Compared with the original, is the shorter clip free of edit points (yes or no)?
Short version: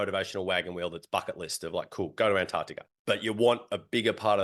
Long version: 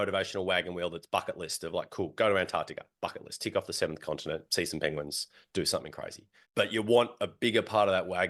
no